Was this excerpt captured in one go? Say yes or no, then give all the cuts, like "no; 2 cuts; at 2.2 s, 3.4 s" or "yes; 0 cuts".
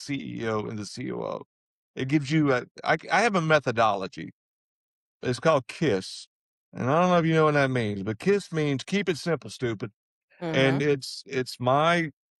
yes; 0 cuts